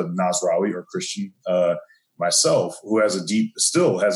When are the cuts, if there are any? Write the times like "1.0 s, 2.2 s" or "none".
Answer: none